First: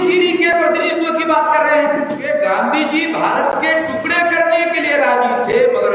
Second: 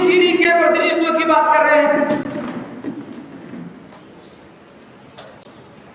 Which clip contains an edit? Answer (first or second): first